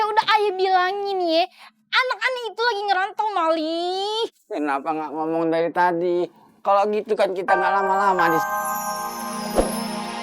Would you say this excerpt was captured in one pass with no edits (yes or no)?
no